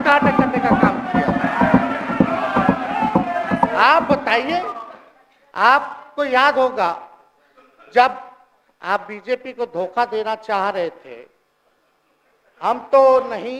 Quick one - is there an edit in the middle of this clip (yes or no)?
no